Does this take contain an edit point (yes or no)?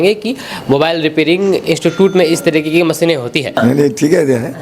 yes